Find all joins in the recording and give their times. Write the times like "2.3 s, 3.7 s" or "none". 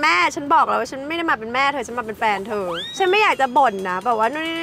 none